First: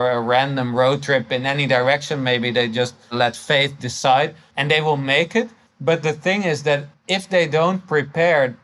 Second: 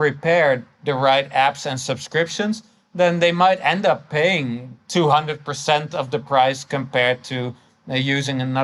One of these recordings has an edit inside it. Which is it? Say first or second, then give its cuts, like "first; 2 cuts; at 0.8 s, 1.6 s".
first; 4 cuts; at 3.1 s, 4.4 s, 5.6 s, 7.0 s